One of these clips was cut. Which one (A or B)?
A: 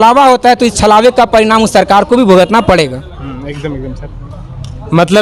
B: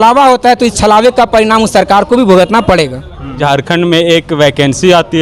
B